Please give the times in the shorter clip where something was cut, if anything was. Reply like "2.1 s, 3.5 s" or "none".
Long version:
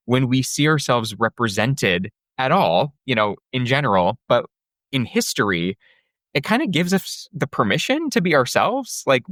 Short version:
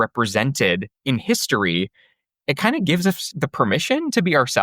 0.9 s, 3.3 s